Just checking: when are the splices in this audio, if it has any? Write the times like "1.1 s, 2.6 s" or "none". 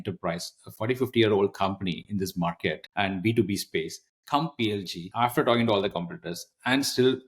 2.8 s, 5.0 s